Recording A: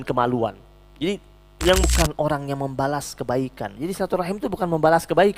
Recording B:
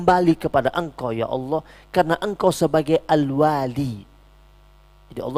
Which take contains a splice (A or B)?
A